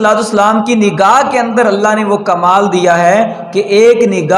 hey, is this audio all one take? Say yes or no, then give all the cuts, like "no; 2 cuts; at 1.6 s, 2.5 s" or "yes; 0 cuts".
yes; 0 cuts